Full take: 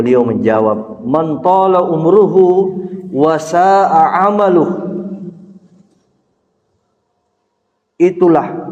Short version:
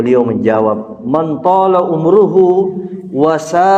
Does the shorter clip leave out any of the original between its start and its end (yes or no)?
no